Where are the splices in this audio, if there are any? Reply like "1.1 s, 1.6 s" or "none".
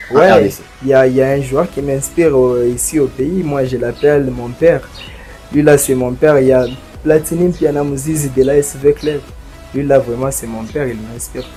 none